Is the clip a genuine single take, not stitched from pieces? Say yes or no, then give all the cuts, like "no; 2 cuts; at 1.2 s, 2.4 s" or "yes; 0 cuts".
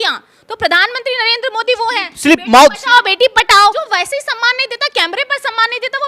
no; 1 cut; at 3.8 s